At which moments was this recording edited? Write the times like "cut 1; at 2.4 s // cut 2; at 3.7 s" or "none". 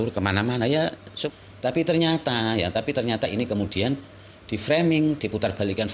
cut 1; at 1.1 s